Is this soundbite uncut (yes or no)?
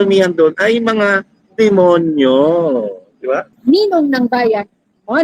no